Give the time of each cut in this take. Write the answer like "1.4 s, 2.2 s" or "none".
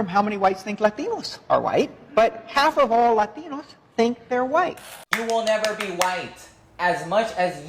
5.1 s

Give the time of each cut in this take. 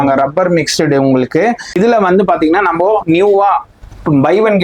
1.8 s

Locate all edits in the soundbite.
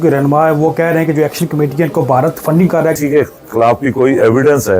3.0 s

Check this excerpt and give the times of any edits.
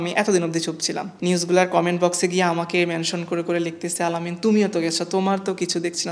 none

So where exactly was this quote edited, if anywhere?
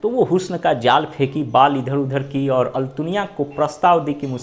none

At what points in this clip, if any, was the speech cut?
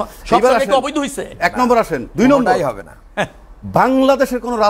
none

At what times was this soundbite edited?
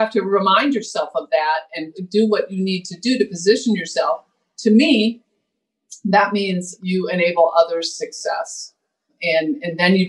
1.9 s, 6.7 s, 9.2 s

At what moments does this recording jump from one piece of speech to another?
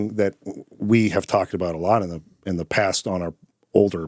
none

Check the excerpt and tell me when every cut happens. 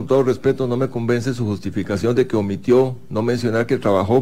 none

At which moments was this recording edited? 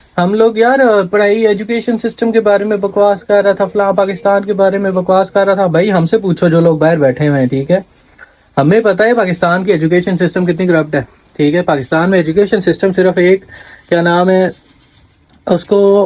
none

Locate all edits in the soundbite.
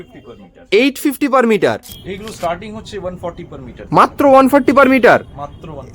2.0 s

